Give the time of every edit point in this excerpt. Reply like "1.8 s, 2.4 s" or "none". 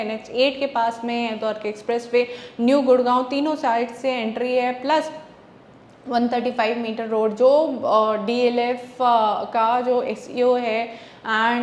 none